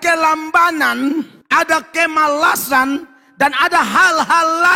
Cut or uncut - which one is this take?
cut